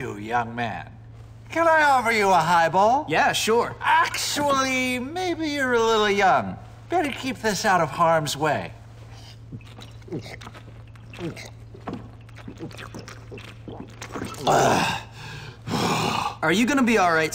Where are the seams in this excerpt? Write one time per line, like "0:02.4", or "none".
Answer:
0:03.0